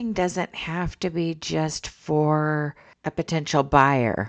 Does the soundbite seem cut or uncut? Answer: uncut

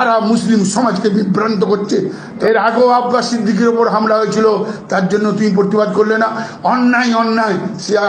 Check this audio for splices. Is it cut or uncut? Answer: cut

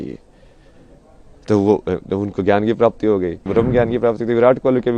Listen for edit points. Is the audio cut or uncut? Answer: cut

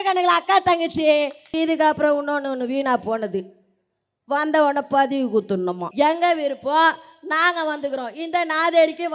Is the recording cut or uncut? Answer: cut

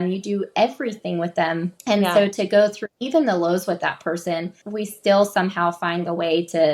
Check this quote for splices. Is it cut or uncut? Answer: cut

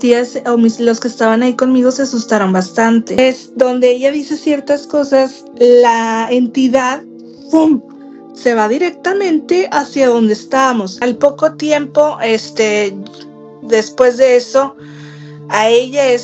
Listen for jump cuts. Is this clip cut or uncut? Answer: cut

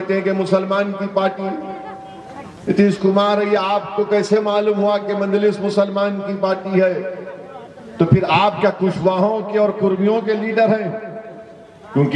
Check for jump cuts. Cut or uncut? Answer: uncut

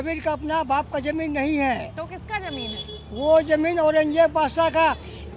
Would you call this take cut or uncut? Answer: uncut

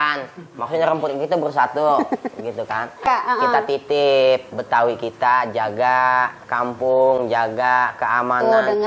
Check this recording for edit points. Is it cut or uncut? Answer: cut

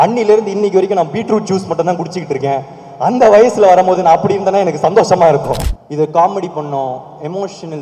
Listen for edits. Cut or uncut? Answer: cut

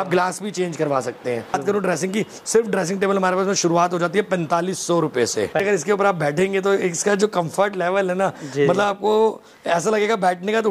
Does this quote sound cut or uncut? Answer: cut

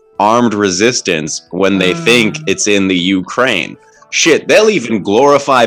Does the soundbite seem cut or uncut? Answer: uncut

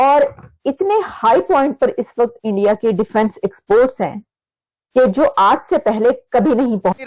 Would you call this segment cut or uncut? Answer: uncut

